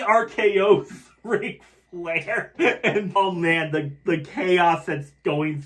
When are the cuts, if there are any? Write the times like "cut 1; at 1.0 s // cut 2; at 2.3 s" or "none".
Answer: cut 1; at 3.2 s